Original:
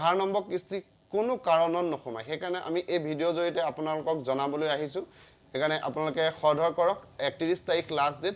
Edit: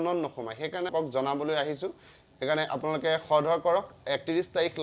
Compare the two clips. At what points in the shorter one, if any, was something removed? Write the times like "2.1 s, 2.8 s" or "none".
0.9 s